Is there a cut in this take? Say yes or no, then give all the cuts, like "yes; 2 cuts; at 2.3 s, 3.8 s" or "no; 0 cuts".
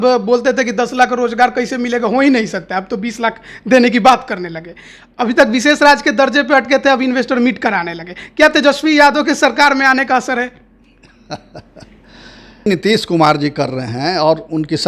yes; 1 cut; at 12.7 s